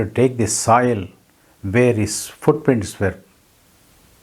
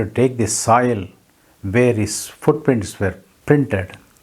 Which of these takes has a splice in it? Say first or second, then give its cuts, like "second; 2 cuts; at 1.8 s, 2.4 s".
second; 1 cut; at 3.3 s